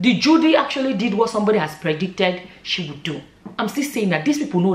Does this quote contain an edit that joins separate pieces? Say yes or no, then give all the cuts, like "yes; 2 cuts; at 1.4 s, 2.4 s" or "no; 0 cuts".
yes; 1 cut; at 3.3 s